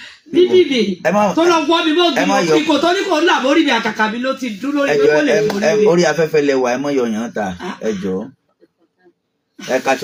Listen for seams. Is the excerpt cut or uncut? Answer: uncut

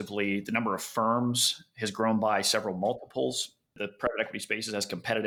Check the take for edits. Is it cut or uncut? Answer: uncut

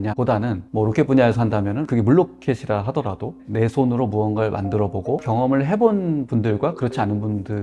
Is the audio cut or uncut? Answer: cut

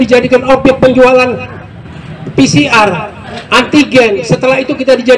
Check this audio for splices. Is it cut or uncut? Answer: uncut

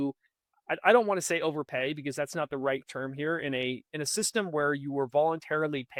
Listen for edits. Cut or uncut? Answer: uncut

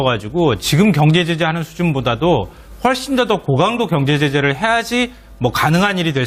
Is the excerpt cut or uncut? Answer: uncut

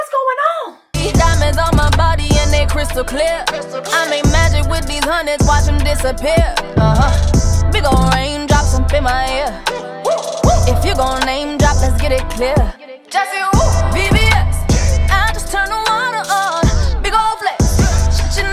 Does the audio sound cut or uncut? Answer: cut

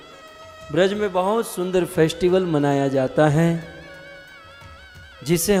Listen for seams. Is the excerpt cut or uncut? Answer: uncut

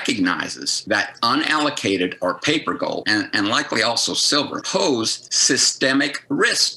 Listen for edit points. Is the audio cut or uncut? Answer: uncut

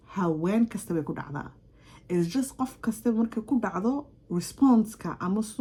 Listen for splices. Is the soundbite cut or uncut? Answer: uncut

